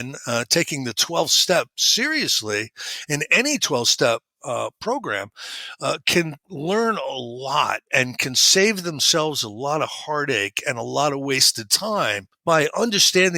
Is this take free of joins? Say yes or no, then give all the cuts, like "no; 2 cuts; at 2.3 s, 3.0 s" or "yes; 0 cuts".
no; 1 cut; at 12.3 s